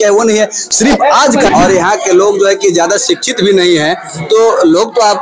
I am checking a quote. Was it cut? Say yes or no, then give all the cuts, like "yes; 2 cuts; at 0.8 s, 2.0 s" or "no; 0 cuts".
yes; 1 cut; at 1.5 s